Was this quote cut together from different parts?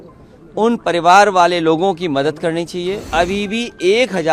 yes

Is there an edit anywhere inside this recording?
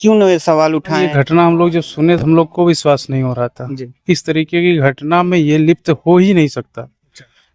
yes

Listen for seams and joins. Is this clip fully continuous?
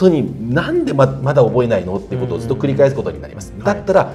yes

